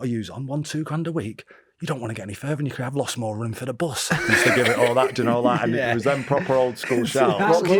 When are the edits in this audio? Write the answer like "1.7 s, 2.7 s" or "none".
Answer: none

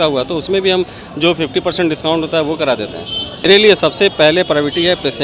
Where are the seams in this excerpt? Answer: 3.5 s

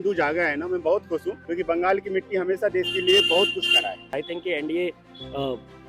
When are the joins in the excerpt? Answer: 1.4 s, 4.2 s

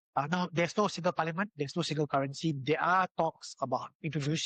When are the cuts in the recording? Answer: none

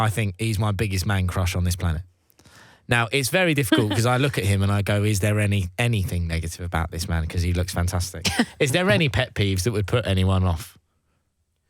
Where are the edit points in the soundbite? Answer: none

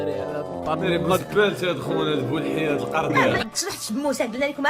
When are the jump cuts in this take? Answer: 3.1 s

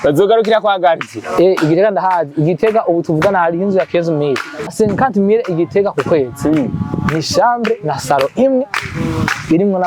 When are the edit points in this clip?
4.7 s

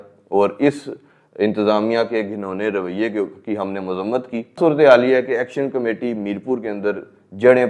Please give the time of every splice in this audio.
4.6 s

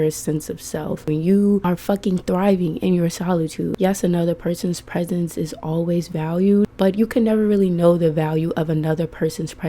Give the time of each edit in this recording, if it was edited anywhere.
1.0 s, 1.6 s, 3.7 s, 6.7 s

